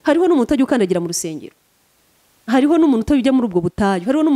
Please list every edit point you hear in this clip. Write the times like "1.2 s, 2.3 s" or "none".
none